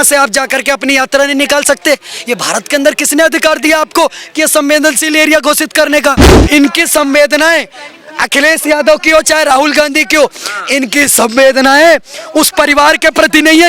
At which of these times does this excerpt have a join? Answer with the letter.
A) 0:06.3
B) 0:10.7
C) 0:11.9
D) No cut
A